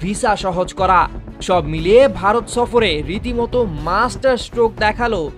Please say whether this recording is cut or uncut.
uncut